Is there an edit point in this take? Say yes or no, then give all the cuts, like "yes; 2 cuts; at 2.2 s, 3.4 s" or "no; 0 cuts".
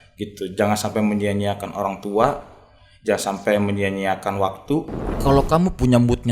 yes; 1 cut; at 5.0 s